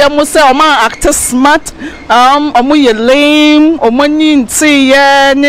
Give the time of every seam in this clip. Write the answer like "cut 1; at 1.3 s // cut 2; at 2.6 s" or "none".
none